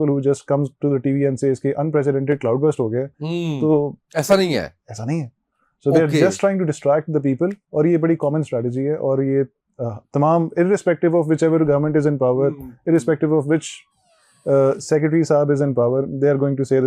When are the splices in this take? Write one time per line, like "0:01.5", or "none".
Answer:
none